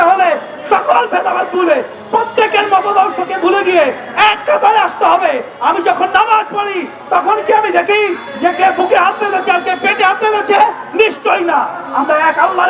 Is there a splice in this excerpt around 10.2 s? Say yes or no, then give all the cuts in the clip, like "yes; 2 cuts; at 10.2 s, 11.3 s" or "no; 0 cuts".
no; 0 cuts